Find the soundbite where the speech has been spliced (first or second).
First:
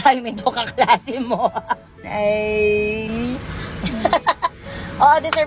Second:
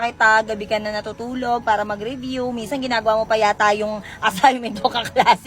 first